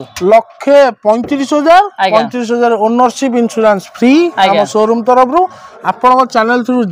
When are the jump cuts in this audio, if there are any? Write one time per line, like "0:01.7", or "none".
0:05.7